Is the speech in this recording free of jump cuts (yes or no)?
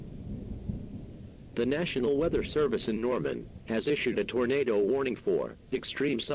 no